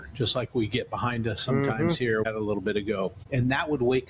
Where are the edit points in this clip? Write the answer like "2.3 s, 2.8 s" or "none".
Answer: 2.2 s, 3.2 s